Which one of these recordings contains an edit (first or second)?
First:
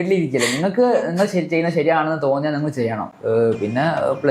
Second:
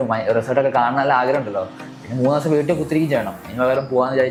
first